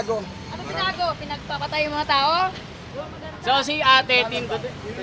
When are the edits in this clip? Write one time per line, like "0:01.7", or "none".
none